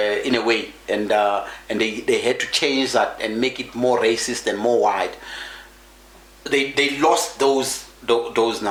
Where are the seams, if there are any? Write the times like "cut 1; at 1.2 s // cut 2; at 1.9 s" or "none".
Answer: none